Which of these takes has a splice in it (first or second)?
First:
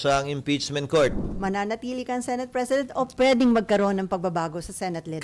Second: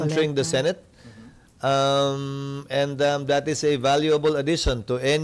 first